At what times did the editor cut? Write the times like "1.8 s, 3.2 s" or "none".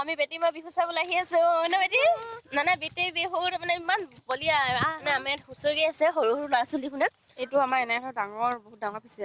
5.0 s, 7.4 s